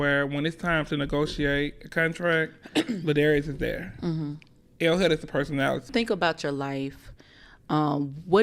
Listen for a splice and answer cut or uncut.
cut